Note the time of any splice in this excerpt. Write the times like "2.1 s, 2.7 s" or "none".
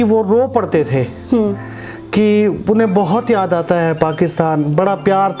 none

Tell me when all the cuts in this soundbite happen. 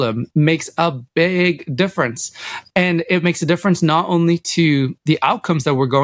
5.0 s

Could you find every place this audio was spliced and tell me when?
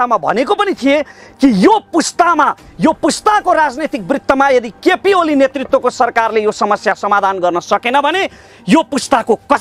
none

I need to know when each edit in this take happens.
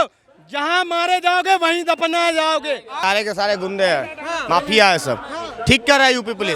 2.9 s

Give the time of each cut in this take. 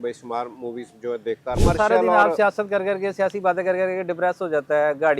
1.6 s

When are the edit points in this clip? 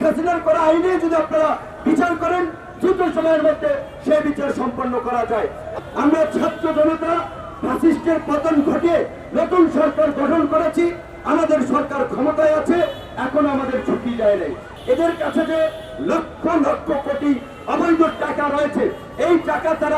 5.8 s, 14.7 s

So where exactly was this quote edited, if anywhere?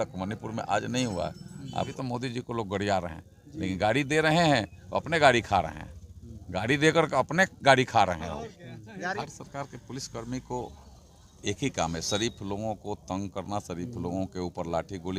1.9 s, 9.2 s

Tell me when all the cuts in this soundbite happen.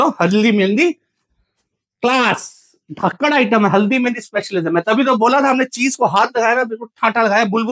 none

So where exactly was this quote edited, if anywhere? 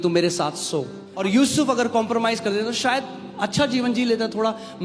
1.0 s

